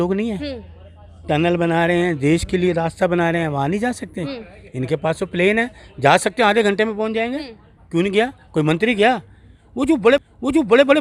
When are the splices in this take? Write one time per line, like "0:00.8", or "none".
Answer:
none